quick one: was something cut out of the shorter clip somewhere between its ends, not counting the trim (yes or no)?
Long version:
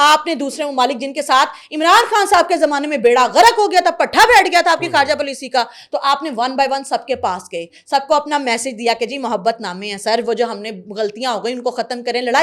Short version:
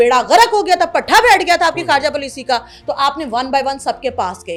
no